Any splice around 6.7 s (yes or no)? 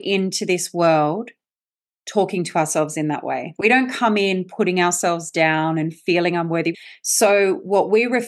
yes